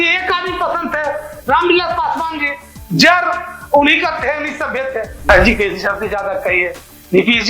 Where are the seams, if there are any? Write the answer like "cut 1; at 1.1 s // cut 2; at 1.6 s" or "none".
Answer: cut 1; at 5.3 s